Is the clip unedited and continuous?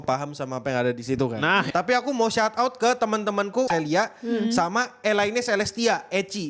no; 2 cuts; at 1.7 s, 3.7 s

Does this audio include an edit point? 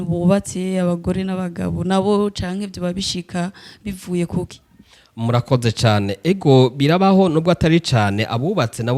no; 0 cuts

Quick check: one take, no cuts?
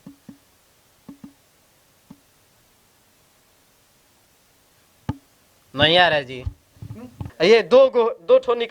no; 1 cut; at 7.2 s

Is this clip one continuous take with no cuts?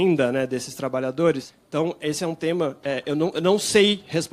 no; 1 cut; at 1.5 s

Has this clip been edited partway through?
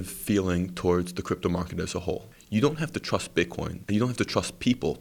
yes; 2 cuts; at 2.3 s, 3.7 s

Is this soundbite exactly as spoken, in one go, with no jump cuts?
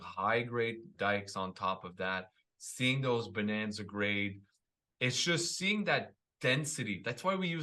no; 1 cut; at 0.9 s

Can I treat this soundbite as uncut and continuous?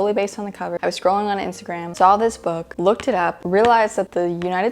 yes; 0 cuts

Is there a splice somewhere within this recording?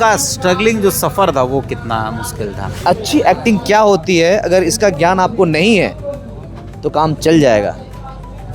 yes; 1 cut; at 2.7 s

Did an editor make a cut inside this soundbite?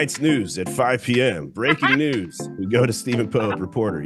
no; 0 cuts

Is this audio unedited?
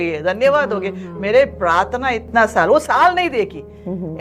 yes; 0 cuts

